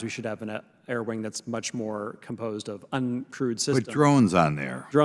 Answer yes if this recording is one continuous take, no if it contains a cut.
yes